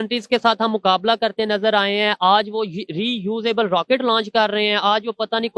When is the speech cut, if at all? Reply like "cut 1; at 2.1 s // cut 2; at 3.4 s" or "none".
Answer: none

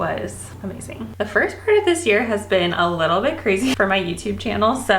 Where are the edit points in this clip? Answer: cut 1; at 1.1 s // cut 2; at 3.8 s

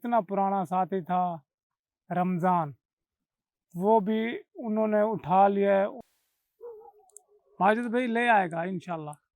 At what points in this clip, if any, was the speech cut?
cut 1; at 6.0 s

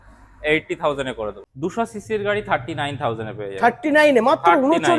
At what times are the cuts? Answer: cut 1; at 1.4 s

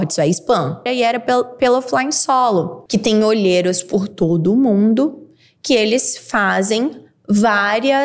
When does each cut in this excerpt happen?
cut 1; at 0.9 s // cut 2; at 2.8 s

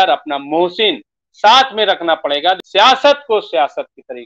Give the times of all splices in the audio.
cut 1; at 2.6 s

